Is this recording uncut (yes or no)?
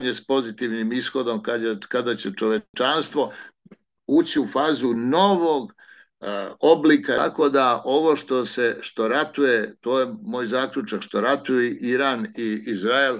no